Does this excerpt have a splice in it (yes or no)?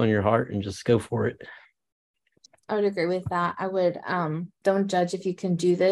yes